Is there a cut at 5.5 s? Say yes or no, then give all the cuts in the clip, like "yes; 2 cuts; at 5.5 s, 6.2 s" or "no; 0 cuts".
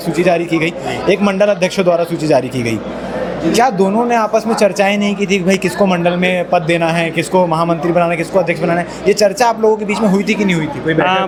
no; 0 cuts